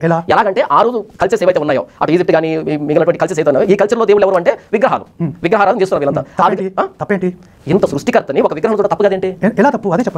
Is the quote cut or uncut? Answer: cut